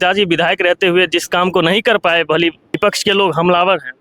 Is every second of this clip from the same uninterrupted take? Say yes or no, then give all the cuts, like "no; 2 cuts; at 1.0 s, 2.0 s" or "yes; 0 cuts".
no; 1 cut; at 2.6 s